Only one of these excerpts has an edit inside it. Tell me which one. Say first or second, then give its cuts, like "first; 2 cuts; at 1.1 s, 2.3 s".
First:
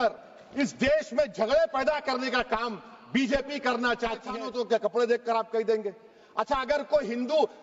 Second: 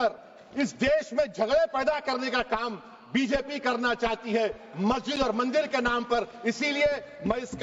first; 1 cut; at 4.3 s